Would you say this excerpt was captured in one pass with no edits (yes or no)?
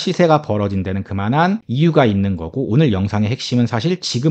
no